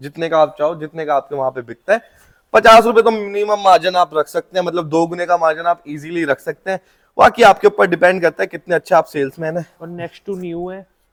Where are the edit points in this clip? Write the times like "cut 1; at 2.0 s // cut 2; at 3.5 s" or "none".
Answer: none